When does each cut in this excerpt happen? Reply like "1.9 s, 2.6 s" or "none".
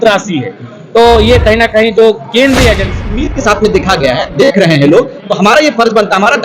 3.3 s